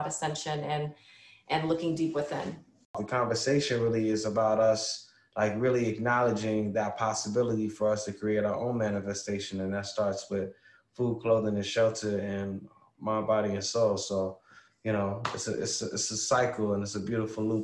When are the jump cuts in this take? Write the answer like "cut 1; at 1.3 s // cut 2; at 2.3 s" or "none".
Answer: cut 1; at 3.0 s